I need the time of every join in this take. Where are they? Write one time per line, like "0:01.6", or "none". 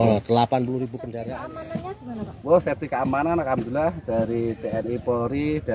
0:01.0